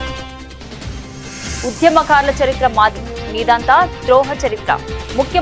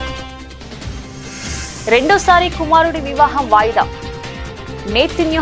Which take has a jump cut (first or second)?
first